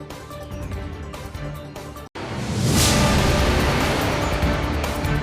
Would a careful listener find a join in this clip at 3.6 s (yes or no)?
no